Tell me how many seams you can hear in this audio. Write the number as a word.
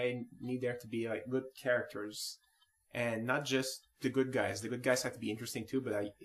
one